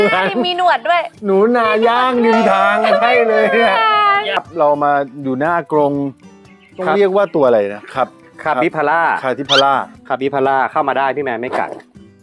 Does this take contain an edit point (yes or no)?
yes